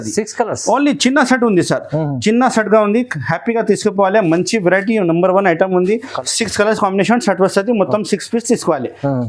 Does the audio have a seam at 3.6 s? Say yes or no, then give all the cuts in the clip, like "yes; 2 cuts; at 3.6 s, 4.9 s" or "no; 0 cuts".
no; 1 cut; at 6.1 s